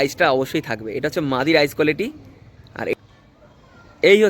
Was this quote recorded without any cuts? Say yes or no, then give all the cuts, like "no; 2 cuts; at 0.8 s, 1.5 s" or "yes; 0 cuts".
no; 1 cut; at 2.9 s